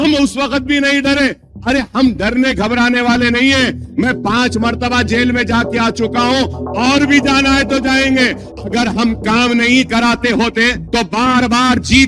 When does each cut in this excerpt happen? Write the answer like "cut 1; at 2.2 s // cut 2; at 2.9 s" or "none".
cut 1; at 8.5 s // cut 2; at 10.8 s